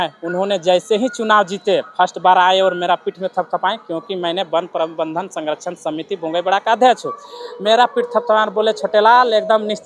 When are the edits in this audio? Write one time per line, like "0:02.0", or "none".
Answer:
none